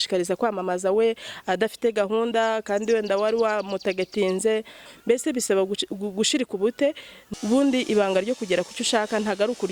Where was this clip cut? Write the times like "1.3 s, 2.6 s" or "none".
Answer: 4.9 s, 7.1 s